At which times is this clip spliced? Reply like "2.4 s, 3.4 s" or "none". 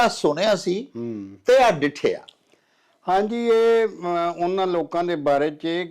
none